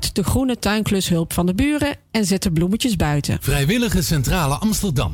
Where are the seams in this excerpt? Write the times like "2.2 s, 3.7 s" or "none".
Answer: 3.4 s